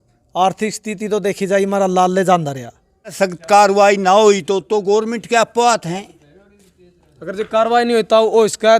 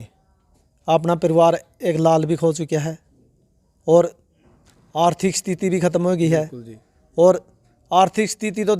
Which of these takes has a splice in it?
first; 1 cut; at 3.1 s

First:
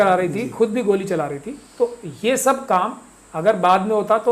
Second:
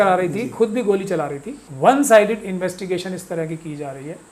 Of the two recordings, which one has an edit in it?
second; 1 cut; at 1.7 s

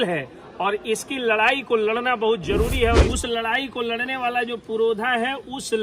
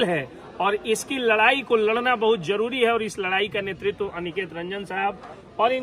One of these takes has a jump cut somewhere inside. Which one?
first; 1 cut; at 3.1 s

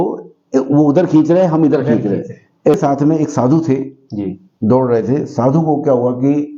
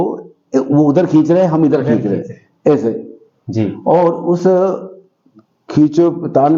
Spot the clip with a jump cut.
first; 1 cut; at 2.7 s

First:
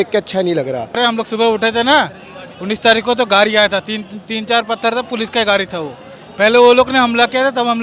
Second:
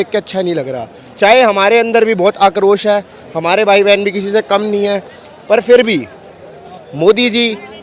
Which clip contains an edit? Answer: first; 1 cut; at 1.0 s

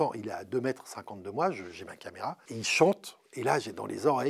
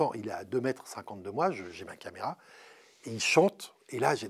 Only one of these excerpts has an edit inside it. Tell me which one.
first; 1 cut; at 2.4 s

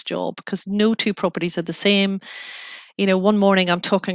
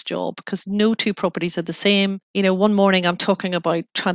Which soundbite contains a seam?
second; 1 cut; at 2.2 s

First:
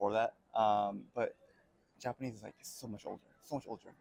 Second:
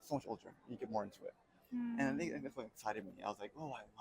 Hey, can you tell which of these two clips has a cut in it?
second; 1 cut; at 1.6 s

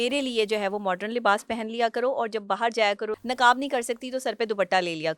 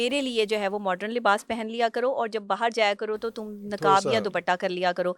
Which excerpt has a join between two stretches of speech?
first; 1 cut; at 3.2 s

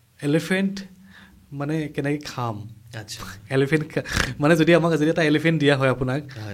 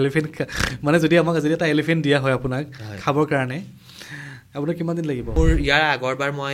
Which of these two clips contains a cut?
second; 1 cut; at 5.4 s

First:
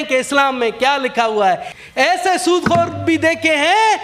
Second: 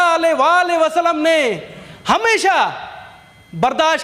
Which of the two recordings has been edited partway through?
first; 1 cut; at 1.8 s

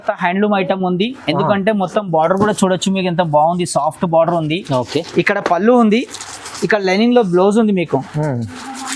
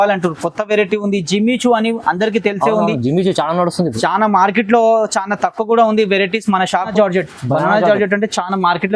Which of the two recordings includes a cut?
second; 1 cut; at 6.9 s

